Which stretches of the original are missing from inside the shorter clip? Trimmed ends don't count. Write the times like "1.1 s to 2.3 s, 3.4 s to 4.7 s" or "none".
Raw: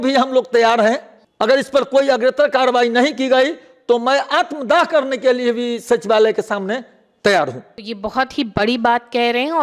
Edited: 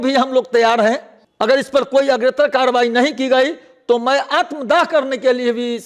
none